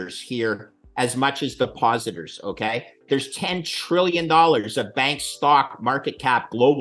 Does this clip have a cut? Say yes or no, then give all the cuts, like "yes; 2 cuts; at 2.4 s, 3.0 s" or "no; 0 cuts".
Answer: yes; 1 cut; at 3.0 s